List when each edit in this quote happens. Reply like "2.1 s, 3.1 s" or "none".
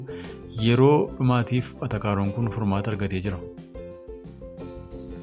3.4 s